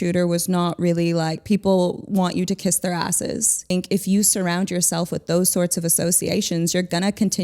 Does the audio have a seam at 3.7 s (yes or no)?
yes